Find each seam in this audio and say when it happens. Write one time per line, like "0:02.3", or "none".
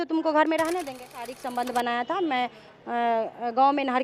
0:01.3